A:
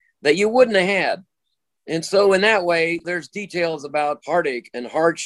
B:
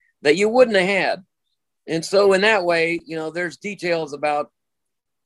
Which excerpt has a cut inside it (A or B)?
A